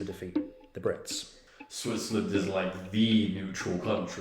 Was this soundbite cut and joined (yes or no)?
yes